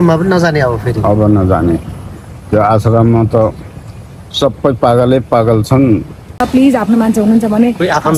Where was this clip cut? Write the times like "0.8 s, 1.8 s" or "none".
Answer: 6.4 s